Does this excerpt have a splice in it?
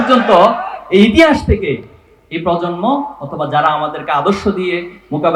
no; 0 cuts

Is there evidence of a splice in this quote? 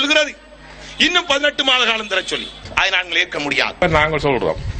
yes; 1 cut; at 3.8 s

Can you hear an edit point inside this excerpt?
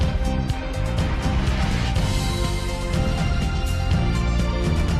no; 0 cuts

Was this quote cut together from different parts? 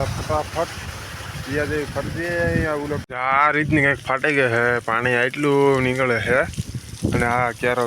yes; 1 cut; at 3.0 s

